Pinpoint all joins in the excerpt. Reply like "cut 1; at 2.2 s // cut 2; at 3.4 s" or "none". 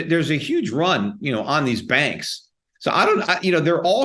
none